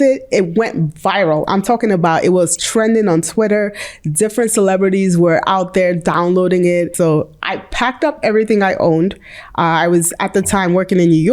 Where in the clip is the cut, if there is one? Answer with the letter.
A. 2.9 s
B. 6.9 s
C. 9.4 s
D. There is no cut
B